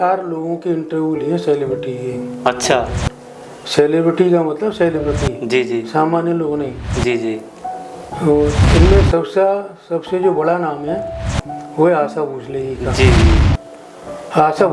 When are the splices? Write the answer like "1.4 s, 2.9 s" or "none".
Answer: none